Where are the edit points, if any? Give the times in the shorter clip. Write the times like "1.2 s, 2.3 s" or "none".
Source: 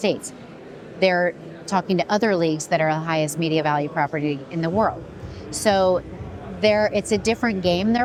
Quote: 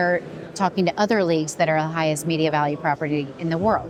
none